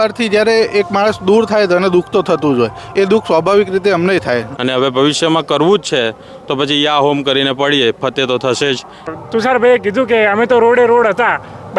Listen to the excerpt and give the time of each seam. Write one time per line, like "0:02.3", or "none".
0:04.5
0:09.1